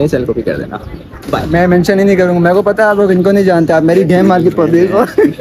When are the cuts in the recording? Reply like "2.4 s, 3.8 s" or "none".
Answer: none